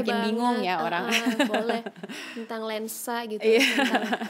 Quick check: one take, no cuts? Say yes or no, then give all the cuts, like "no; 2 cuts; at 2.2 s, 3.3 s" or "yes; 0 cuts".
yes; 0 cuts